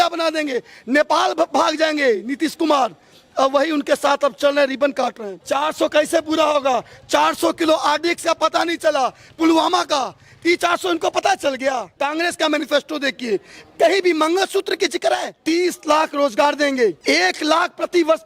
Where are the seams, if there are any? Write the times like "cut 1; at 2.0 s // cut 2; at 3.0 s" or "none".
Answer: cut 1; at 5.5 s // cut 2; at 11.9 s // cut 3; at 15.4 s // cut 4; at 17.0 s